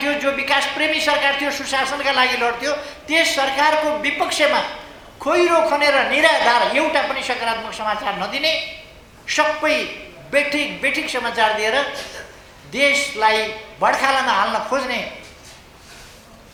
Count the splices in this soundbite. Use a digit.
0